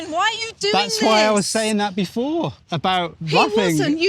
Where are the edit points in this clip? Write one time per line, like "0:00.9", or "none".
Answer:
0:02.6